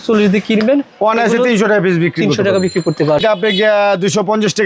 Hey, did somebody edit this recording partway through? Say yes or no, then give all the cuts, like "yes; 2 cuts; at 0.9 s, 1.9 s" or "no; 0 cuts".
yes; 1 cut; at 3.2 s